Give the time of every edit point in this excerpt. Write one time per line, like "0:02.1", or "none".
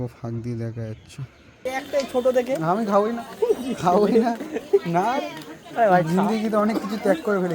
0:01.6